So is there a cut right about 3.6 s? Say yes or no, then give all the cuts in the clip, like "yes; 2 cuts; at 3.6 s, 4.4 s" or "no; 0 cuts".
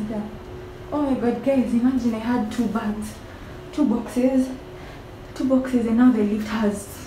no; 0 cuts